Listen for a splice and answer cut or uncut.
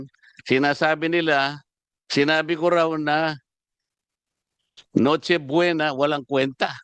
uncut